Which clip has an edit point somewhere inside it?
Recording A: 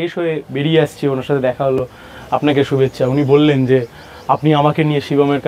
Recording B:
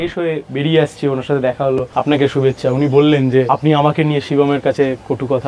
B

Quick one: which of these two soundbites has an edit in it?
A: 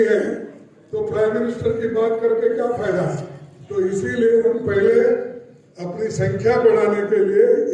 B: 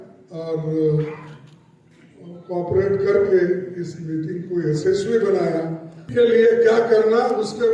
B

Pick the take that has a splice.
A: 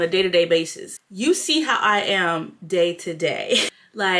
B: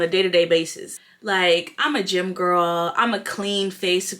B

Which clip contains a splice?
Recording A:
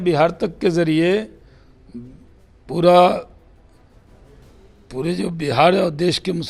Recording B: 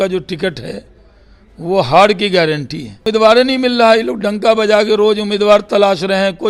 B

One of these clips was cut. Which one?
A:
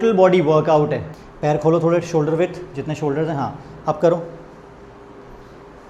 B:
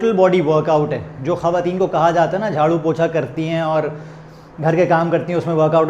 A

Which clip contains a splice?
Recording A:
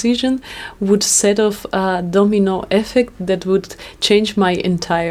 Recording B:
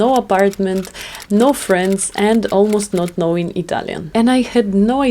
B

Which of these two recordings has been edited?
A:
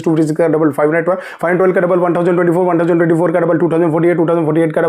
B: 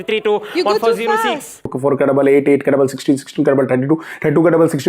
B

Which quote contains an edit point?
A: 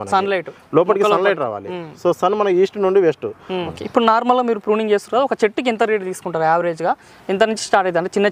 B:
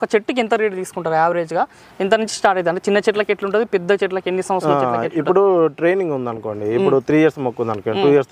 A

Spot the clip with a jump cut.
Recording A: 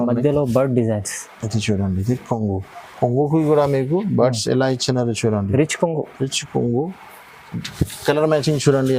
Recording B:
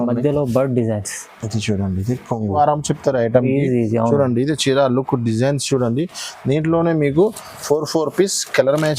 B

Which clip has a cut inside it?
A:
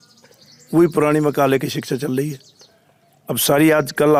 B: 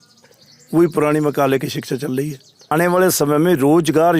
B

